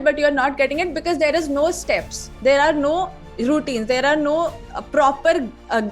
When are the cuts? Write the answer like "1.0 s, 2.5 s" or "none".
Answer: none